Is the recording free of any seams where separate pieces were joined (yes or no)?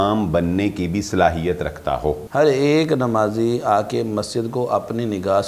no